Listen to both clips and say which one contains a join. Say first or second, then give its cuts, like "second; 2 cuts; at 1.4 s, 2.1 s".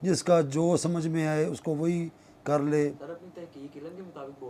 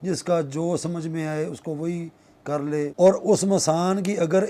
second; 1 cut; at 2.9 s